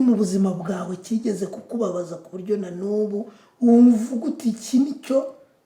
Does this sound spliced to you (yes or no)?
no